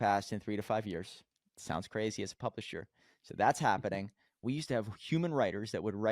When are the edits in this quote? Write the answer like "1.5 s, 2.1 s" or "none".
4.4 s